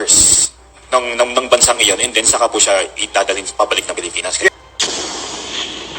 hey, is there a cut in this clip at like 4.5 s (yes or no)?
yes